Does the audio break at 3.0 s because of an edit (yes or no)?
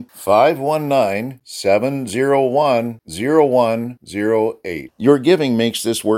no